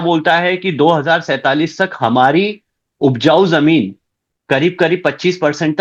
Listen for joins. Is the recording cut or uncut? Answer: uncut